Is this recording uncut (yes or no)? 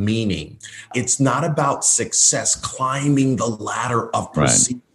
no